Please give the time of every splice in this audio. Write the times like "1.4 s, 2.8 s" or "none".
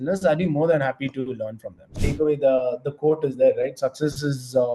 2.0 s